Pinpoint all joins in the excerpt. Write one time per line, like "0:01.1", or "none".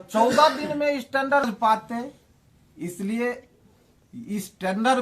0:01.4

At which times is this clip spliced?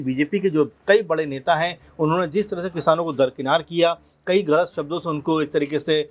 none

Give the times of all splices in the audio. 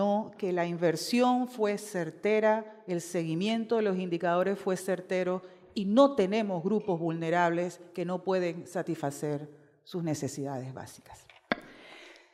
none

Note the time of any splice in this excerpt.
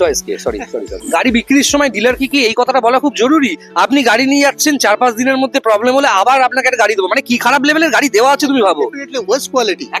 0:01.0

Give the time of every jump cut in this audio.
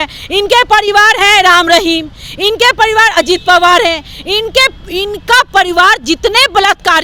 none

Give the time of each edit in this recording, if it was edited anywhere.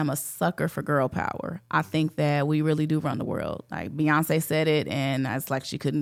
none

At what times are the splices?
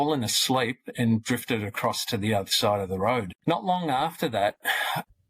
0:03.3

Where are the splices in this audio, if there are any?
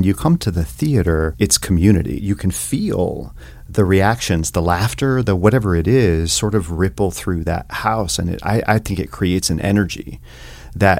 0:01.3
0:02.1

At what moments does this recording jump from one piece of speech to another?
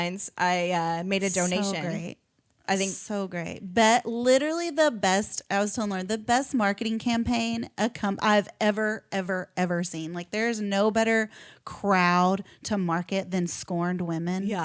none

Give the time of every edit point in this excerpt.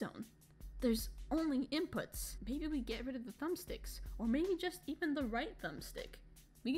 none

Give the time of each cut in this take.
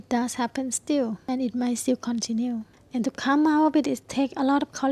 0:01.2
0:02.8

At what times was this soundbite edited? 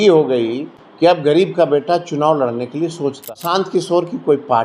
0:01.2
0:03.3

